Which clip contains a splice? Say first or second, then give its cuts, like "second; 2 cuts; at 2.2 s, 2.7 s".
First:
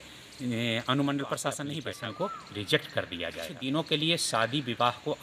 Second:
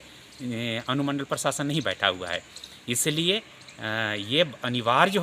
first; 2 cuts; at 1.8 s, 3.5 s